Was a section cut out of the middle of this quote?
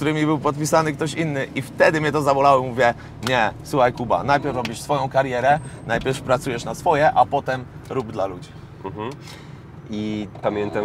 no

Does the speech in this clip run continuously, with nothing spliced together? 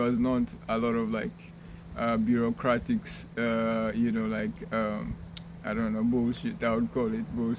yes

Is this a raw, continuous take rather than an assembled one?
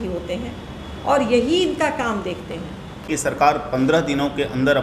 no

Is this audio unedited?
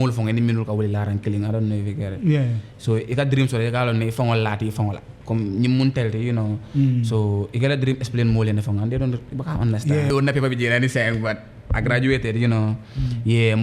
no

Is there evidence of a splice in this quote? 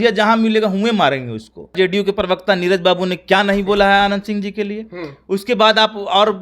yes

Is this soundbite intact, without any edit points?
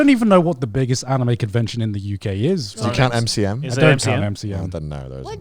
no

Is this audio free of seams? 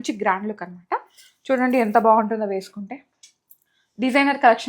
yes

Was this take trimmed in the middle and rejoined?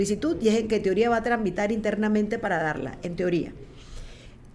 no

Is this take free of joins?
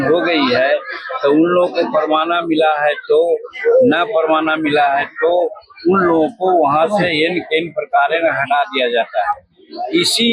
yes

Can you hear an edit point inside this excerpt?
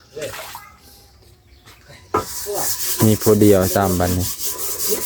no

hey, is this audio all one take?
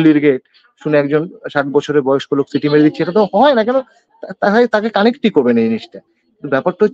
yes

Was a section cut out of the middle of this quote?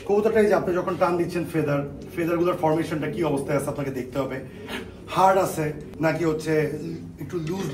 no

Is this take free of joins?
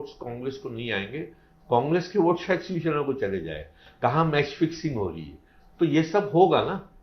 yes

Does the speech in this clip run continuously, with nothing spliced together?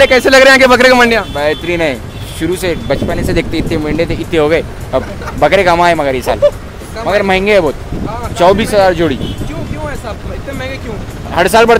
yes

